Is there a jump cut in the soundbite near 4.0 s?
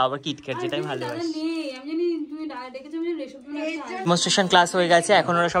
yes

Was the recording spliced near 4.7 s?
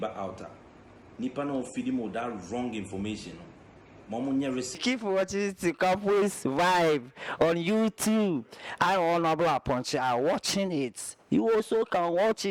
yes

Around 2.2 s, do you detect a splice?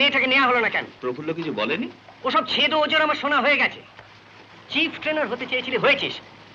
no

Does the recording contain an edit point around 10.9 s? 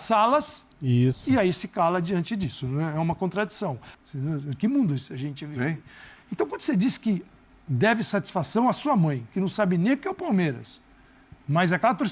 no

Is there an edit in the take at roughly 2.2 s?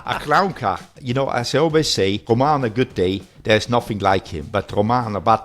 yes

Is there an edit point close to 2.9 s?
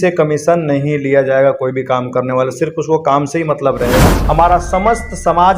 no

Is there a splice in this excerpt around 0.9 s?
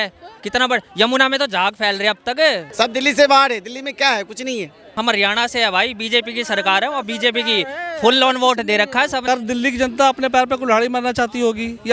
no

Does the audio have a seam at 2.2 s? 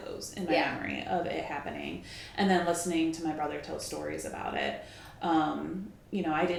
no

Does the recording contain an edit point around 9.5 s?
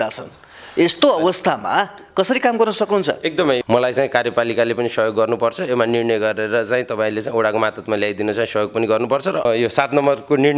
yes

